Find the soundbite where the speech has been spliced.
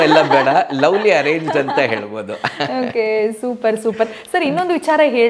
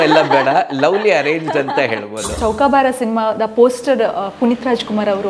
second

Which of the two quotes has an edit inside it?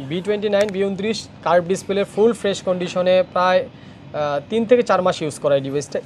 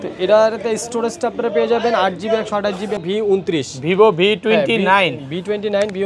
second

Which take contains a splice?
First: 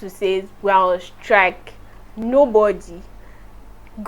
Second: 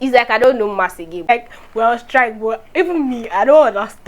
second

